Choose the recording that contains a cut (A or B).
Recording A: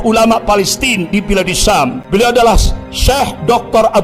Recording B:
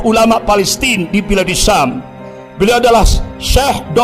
A